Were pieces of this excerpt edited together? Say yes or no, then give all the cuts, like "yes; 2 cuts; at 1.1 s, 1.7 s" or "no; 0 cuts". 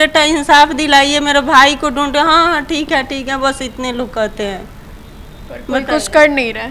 no; 0 cuts